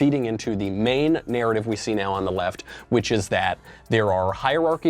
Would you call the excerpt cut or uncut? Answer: uncut